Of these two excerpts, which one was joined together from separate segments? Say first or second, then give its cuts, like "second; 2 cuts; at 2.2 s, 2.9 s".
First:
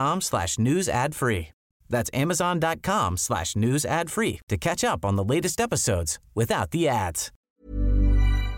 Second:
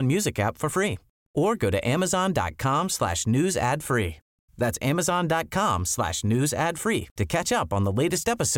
first; 1 cut; at 7.3 s